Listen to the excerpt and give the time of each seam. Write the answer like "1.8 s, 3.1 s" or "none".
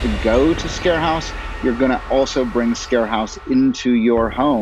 none